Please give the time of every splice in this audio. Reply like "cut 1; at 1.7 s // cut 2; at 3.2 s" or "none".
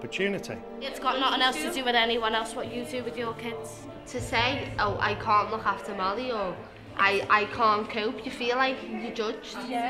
cut 1; at 0.9 s // cut 2; at 4.0 s